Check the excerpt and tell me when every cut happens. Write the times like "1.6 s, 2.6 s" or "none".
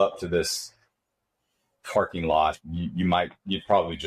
none